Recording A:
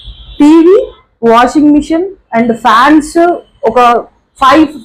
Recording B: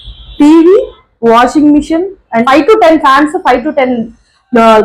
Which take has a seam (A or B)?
B